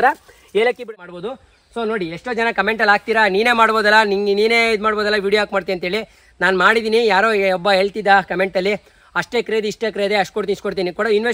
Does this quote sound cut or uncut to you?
cut